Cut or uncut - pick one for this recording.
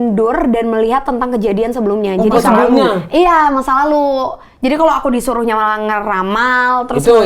uncut